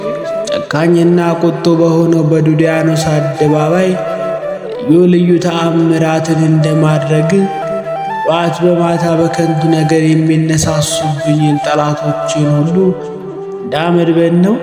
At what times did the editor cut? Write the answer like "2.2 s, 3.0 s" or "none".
none